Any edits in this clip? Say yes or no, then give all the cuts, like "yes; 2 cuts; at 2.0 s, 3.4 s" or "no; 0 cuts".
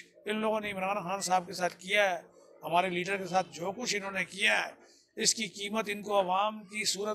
no; 0 cuts